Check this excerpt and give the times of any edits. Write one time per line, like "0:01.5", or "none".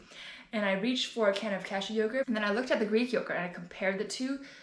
0:02.3